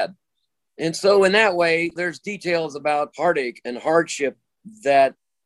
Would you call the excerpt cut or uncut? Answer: cut